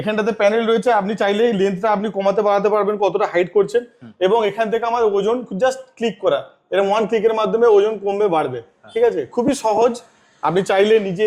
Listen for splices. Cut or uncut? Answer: uncut